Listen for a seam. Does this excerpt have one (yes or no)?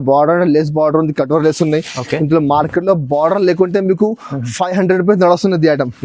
no